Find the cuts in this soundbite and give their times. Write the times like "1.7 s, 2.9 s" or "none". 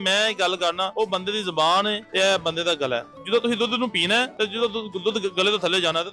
0.9 s, 2.0 s, 3.1 s, 4.3 s

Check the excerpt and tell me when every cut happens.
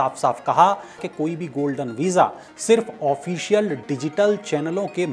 1.0 s

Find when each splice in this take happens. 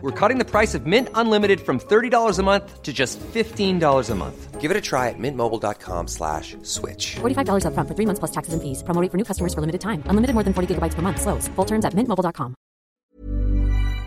12.9 s

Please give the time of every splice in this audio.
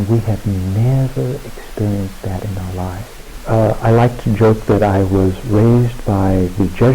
3.3 s

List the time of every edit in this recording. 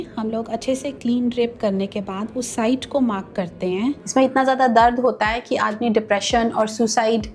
4.0 s

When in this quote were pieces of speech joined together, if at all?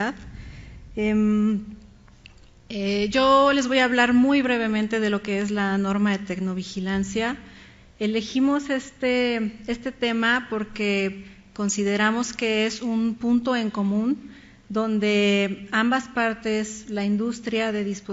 13.9 s

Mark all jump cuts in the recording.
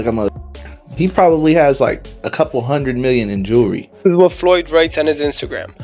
4.1 s

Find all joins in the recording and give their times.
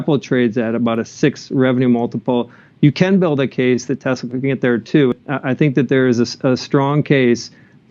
5.1 s

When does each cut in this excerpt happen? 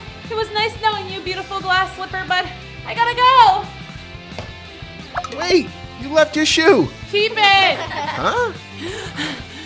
none

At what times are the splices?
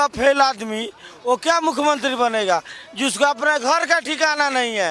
none

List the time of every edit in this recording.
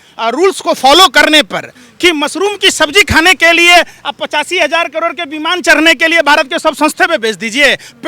none

